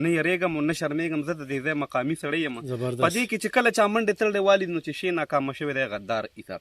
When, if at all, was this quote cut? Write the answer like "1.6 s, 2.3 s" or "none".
none